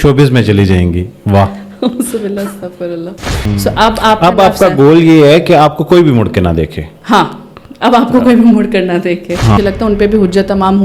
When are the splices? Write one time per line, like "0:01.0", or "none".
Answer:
0:03.5
0:09.6